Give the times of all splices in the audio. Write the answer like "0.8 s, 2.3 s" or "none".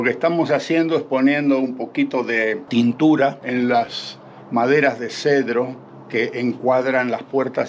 none